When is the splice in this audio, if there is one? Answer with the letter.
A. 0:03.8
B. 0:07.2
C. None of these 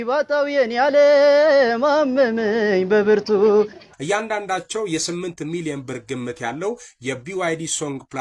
A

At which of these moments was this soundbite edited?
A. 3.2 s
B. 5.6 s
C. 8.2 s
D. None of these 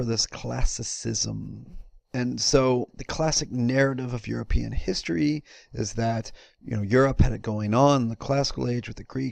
B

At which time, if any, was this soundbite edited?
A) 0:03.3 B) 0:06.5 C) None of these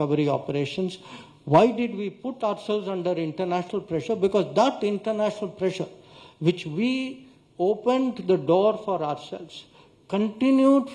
C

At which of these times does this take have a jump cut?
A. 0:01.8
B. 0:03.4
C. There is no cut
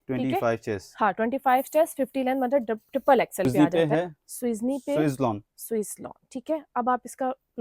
B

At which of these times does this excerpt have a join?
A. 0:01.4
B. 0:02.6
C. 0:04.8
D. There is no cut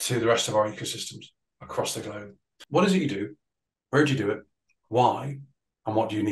B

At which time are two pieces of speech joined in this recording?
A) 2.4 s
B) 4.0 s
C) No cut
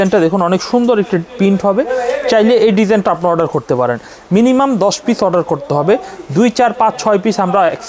C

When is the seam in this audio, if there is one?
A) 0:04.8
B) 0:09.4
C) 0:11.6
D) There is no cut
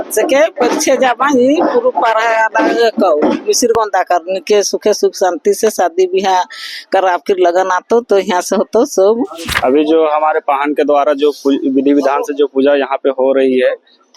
B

